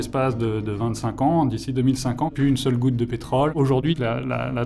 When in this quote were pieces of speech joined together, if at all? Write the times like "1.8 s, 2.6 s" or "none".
3.5 s